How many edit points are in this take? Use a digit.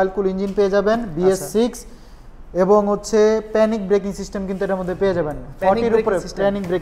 0